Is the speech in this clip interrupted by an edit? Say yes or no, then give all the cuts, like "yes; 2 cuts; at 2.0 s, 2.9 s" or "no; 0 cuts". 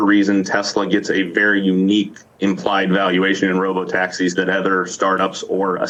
no; 0 cuts